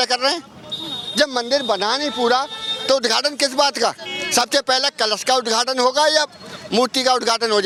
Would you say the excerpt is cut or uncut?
uncut